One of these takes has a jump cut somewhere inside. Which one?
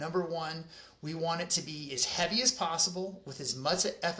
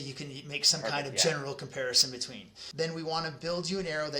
second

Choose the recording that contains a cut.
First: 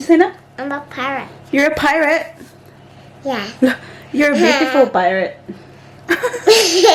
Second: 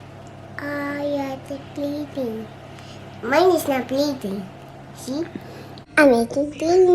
second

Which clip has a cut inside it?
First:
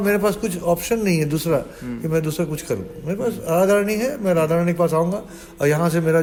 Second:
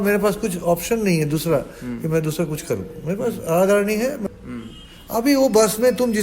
second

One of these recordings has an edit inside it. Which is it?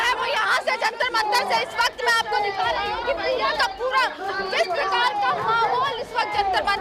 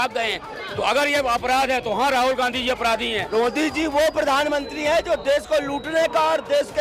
second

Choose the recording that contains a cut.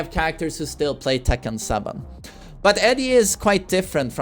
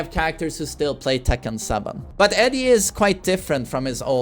second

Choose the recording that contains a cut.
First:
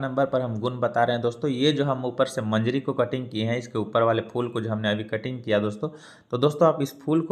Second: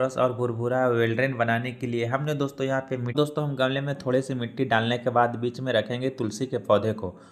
second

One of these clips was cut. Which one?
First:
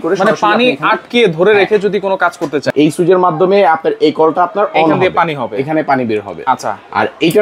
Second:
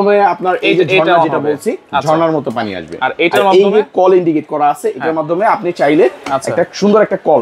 first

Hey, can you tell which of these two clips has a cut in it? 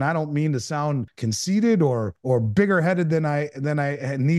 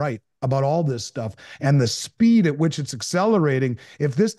first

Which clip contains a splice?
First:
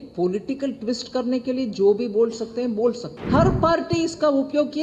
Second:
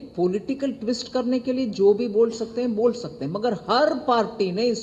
first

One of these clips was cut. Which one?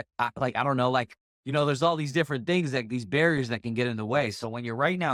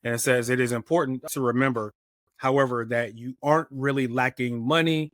second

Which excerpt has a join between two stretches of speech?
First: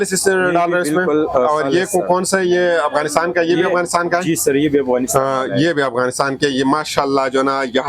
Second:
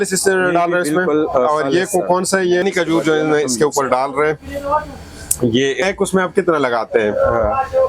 second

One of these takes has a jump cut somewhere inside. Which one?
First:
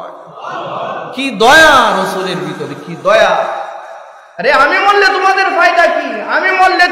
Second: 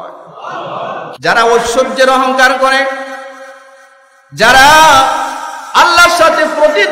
second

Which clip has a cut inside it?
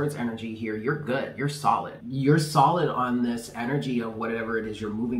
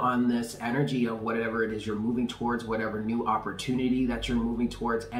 first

